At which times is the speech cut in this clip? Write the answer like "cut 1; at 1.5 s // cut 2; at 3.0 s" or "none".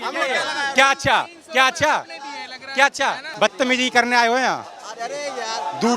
cut 1; at 3.2 s